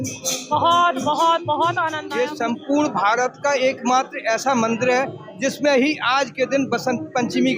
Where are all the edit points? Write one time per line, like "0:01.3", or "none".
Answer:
0:01.9